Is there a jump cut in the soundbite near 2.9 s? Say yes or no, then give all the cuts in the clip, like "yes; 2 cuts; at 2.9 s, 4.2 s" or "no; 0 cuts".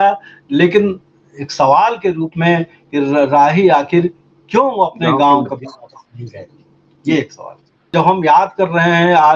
no; 1 cut; at 7.9 s